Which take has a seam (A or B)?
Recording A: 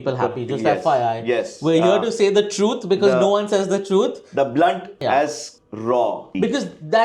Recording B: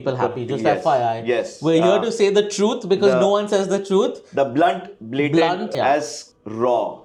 A